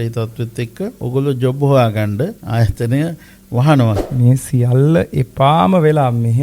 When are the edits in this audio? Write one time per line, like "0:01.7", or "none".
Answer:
0:01.0
0:02.4
0:04.1